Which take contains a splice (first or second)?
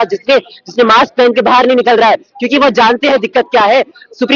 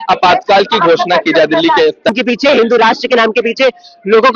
second